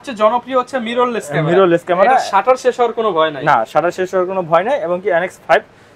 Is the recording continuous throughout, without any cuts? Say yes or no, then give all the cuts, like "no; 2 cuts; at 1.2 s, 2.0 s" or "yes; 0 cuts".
yes; 0 cuts